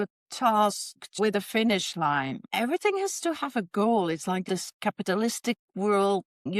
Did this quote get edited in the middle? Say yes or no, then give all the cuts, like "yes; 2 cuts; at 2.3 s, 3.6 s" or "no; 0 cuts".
yes; 1 cut; at 2.4 s